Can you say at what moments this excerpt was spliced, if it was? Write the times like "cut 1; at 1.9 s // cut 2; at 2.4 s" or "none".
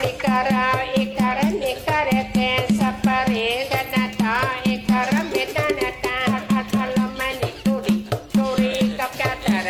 none